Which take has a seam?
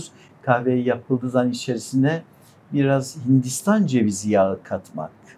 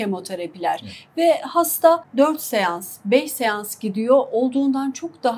second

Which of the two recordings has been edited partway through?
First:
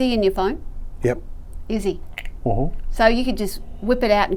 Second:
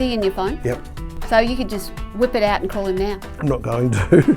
second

